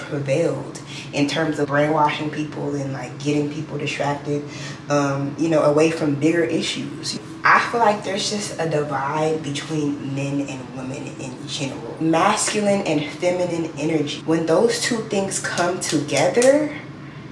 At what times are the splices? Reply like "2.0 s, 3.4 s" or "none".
7.1 s, 11.9 s

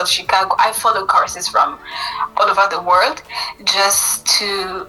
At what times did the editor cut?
none

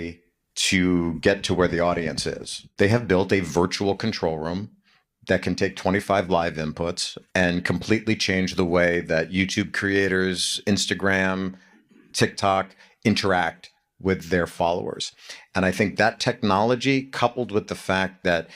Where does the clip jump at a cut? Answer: 2.6 s

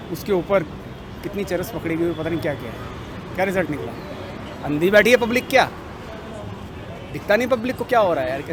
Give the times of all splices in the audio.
none

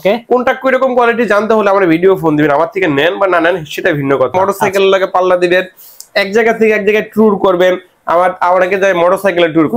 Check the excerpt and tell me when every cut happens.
4.3 s

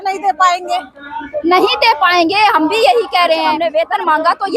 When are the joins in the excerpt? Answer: 3.6 s

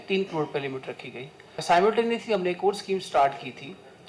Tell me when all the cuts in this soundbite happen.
1.6 s

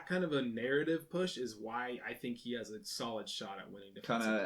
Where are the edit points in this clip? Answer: none

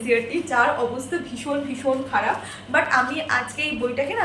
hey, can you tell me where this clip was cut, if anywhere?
none

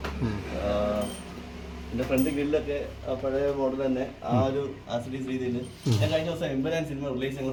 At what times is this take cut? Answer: none

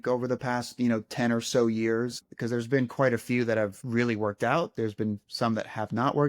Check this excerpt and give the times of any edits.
2.3 s, 3.8 s

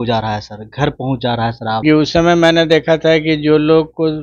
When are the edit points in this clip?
1.8 s

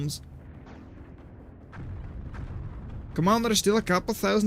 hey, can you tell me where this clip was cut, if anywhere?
none

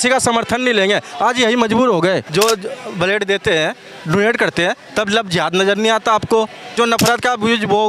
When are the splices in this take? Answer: 2.3 s, 6.7 s

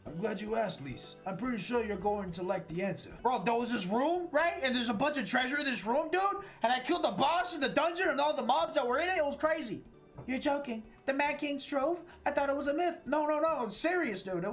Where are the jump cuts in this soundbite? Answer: none

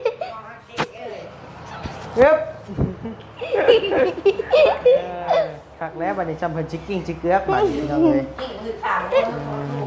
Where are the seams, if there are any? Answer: none

